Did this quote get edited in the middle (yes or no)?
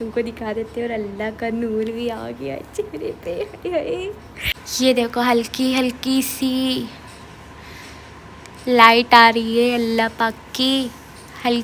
no